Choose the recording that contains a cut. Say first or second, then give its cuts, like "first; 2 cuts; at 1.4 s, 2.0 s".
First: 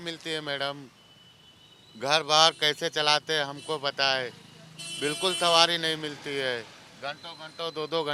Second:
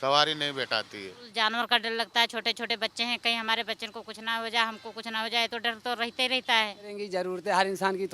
second; 2 cuts; at 1.2 s, 7.0 s